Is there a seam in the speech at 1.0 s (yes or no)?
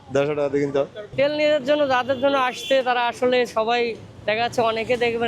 yes